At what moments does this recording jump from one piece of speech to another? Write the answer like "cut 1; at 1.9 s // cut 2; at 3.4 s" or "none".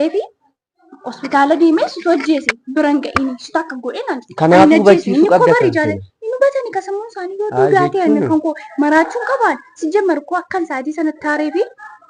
none